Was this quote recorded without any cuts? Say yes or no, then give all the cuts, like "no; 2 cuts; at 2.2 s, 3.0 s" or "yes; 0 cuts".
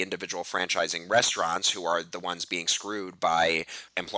yes; 0 cuts